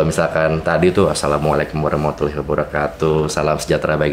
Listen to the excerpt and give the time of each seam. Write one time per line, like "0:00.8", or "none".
none